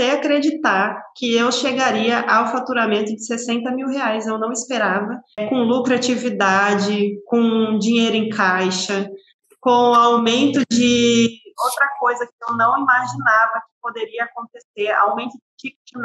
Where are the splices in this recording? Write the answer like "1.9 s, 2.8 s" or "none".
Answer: 5.4 s